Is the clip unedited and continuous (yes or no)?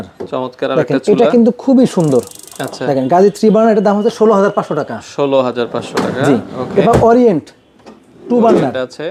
yes